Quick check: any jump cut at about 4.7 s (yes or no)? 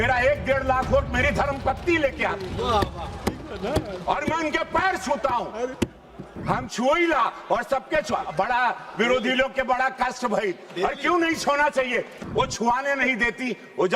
no